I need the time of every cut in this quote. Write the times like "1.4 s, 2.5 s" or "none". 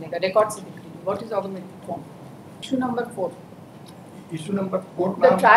2.5 s